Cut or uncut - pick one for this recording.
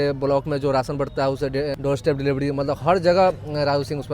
cut